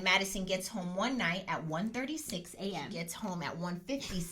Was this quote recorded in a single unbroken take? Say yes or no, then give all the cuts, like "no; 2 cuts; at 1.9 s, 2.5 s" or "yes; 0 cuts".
no; 1 cut; at 3.0 s